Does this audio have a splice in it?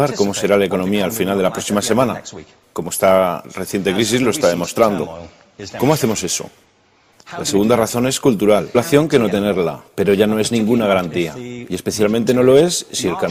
no; 0 cuts

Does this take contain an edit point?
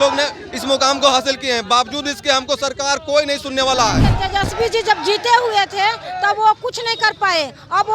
yes; 1 cut; at 4.1 s

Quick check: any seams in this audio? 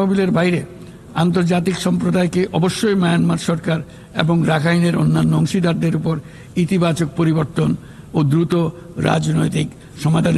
no; 0 cuts

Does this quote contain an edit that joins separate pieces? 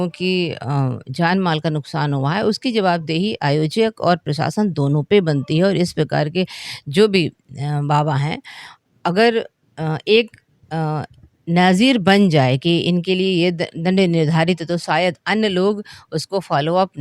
no; 0 cuts

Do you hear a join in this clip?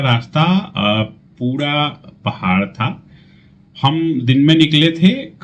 no; 0 cuts

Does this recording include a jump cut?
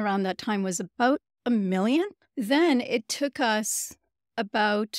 yes; 1 cut; at 2.2 s

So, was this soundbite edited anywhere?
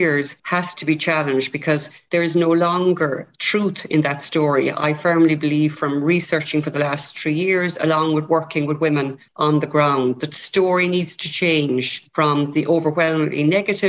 no; 0 cuts

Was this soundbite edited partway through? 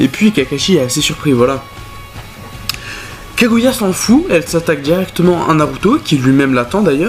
yes; 1 cut; at 5.0 s

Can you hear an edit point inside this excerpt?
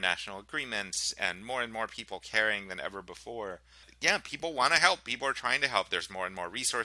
yes; 1 cut; at 3.9 s

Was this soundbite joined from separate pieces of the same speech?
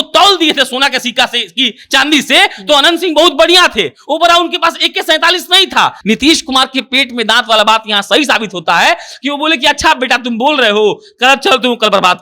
yes; 1 cut; at 6.0 s

